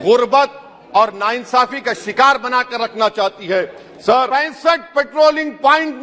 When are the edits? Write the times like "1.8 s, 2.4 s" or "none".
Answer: 4.3 s

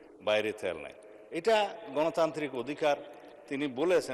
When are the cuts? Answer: none

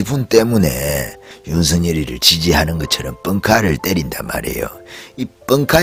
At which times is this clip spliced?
none

